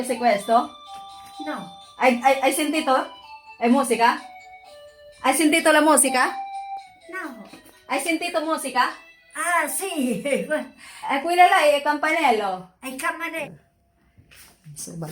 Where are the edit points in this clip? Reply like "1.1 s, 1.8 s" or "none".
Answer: 13.4 s